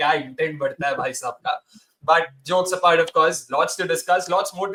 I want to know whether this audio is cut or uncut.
uncut